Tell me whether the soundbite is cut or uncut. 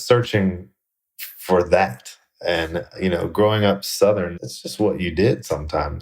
uncut